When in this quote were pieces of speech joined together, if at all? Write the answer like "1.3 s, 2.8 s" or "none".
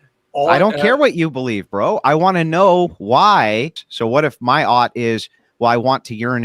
3.8 s